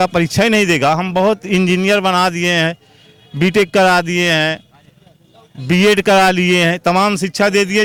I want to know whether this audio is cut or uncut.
uncut